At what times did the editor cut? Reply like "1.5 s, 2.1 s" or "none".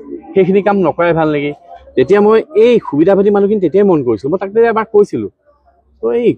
1.7 s